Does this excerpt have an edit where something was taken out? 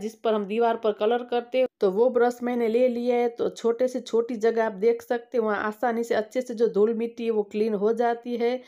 no; 0 cuts

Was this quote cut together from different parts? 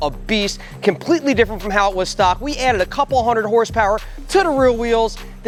no; 0 cuts

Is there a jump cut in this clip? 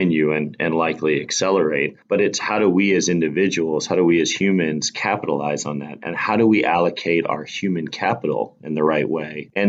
no; 0 cuts

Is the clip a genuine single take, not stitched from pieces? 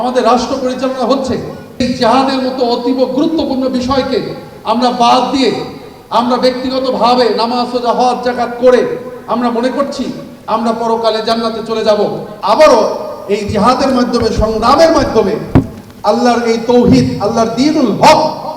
no; 2 cuts; at 1.8 s, 12.3 s

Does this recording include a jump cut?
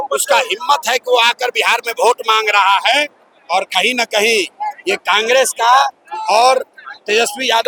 no; 0 cuts

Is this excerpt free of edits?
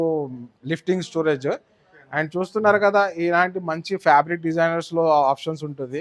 yes; 0 cuts

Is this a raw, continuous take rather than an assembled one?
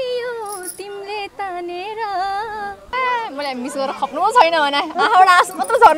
no; 1 cut; at 2.9 s

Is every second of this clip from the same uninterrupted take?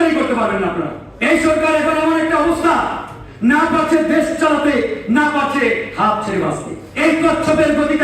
no; 2 cuts; at 1.0 s, 6.8 s

